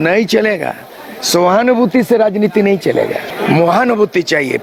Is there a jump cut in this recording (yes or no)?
no